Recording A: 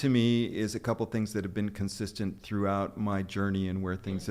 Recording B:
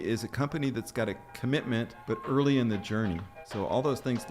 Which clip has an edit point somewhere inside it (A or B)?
B